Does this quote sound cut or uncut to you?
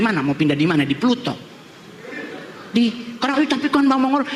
uncut